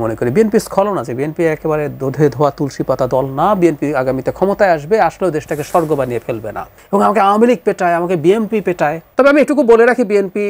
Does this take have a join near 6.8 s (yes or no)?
yes